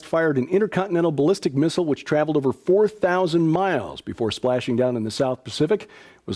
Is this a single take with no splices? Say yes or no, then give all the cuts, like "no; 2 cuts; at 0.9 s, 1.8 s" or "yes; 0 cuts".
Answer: no; 1 cut; at 5.4 s